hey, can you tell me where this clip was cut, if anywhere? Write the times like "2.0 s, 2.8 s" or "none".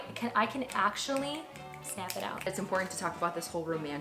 2.5 s